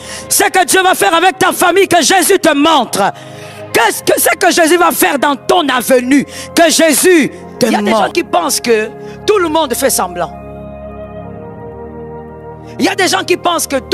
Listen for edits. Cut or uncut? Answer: cut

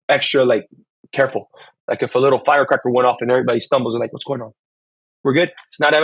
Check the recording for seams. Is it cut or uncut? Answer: uncut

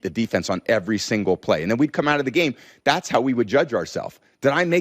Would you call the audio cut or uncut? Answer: uncut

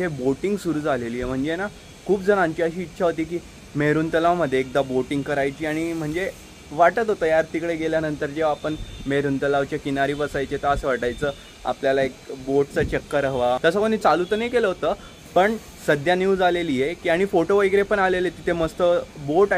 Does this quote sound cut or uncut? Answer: uncut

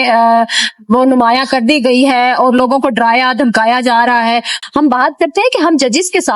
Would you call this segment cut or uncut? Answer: cut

